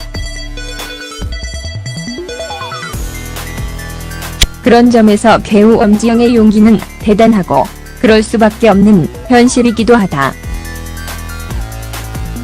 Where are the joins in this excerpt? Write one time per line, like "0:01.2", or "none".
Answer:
0:03.2

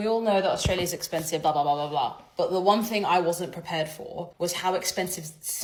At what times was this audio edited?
none

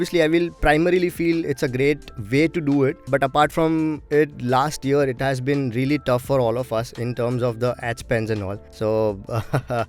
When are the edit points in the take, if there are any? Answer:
0:03.0

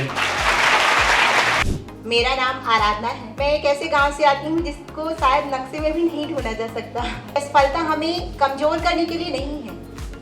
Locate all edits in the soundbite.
0:01.6
0:03.3
0:07.4

